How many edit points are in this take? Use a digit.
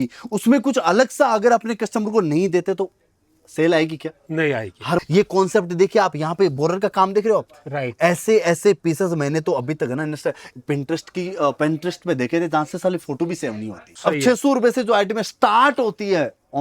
2